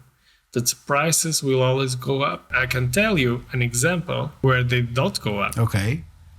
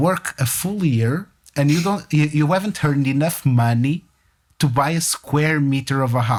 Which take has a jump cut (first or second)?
first